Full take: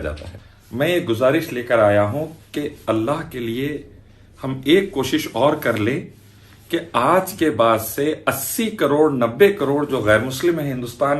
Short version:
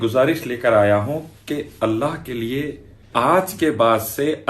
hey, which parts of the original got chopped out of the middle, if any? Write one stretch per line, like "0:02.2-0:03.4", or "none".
0:04.1-0:06.9